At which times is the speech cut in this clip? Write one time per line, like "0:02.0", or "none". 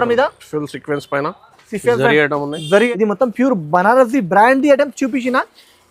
0:02.9

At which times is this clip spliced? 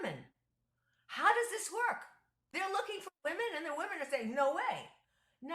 0:02.4

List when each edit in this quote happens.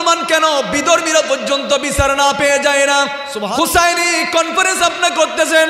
0:03.4

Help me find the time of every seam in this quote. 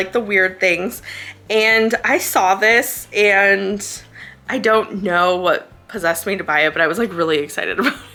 none

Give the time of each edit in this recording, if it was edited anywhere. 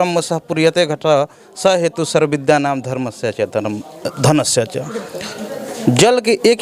none

